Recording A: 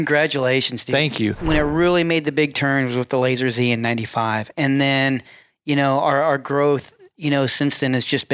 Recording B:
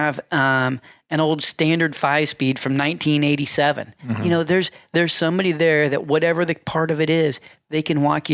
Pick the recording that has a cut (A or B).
A